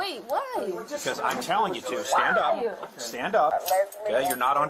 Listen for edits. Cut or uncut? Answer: cut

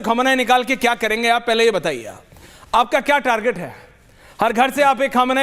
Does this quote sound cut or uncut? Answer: uncut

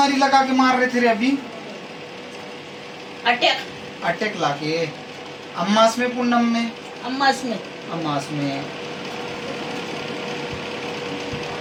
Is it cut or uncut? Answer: uncut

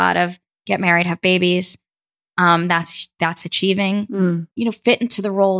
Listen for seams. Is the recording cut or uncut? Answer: uncut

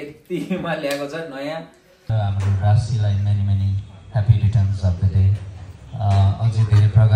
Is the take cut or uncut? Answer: cut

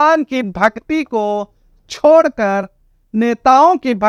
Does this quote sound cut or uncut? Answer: uncut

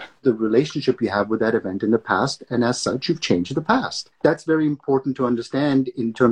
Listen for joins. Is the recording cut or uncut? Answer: uncut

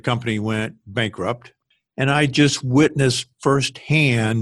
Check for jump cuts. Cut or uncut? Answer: cut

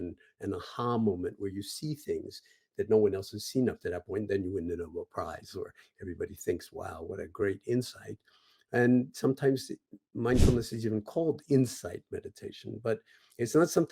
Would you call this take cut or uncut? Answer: uncut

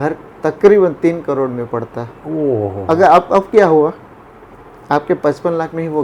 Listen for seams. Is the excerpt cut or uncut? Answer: uncut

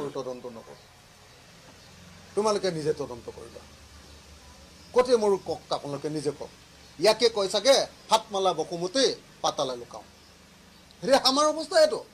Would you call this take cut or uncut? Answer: uncut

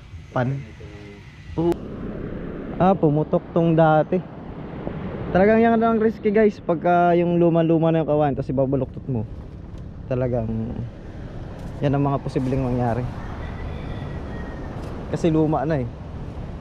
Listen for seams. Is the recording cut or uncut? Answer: cut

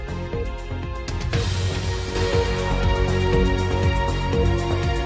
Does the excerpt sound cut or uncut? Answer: cut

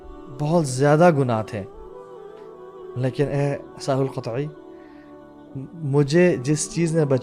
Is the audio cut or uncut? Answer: uncut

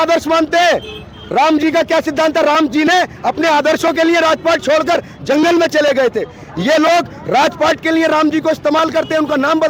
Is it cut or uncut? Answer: uncut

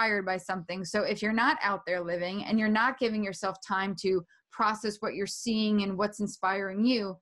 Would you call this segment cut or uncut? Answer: uncut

